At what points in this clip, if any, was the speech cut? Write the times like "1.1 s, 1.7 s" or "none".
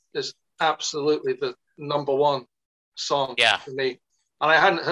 none